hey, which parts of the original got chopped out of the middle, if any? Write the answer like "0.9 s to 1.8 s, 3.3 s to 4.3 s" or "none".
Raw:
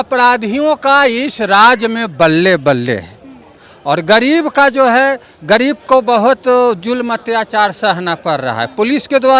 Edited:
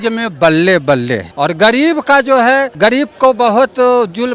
3.0 s to 3.7 s, 5.2 s to 5.4 s